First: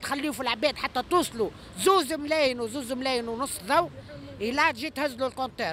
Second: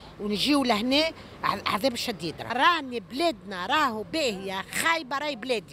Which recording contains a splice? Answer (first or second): second